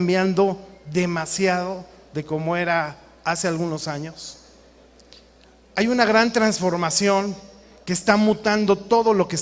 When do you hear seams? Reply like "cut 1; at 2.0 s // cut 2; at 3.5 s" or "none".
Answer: cut 1; at 7.0 s